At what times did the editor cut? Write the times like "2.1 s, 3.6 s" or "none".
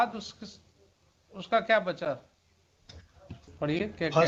none

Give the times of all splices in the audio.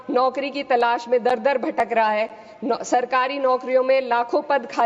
none

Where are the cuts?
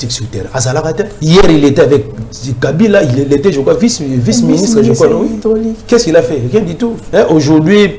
1.1 s, 7.0 s

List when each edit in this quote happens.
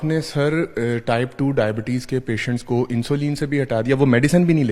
none

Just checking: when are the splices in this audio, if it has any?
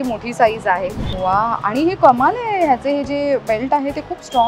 1.0 s

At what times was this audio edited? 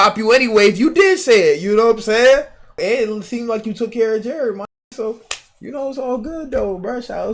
2.7 s

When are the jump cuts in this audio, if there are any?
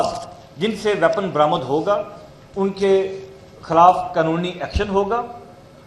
none

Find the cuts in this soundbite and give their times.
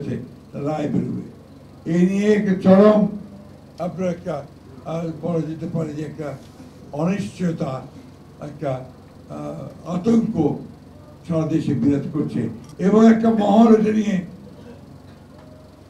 12.6 s

